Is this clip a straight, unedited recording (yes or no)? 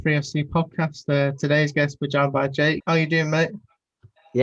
no